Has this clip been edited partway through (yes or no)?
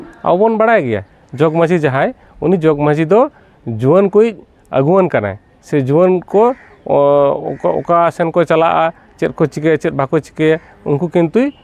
no